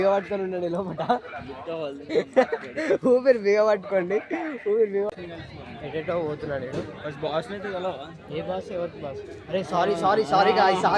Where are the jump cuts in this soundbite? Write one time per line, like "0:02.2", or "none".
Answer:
none